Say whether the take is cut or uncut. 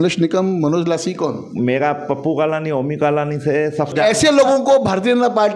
cut